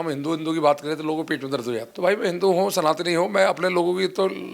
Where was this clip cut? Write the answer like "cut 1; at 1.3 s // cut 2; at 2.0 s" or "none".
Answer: cut 1; at 1.9 s